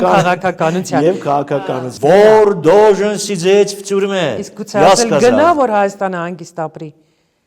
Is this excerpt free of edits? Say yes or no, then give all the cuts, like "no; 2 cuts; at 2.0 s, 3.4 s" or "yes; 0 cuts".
no; 1 cut; at 1.6 s